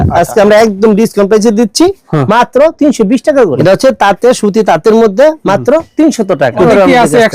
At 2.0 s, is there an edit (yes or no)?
no